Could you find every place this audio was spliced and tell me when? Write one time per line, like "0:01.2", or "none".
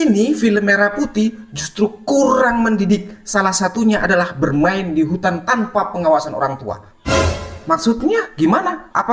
0:06.9